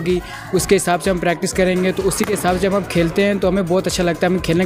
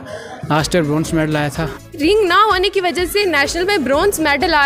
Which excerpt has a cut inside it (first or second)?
second